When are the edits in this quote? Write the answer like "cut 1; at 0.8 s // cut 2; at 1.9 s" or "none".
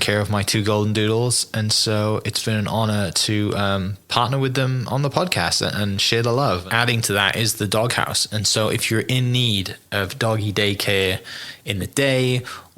cut 1; at 6.7 s